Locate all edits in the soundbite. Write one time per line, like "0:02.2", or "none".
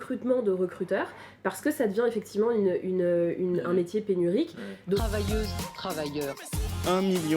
0:05.0